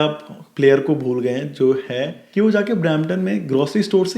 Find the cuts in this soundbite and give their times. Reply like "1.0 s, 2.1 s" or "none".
2.1 s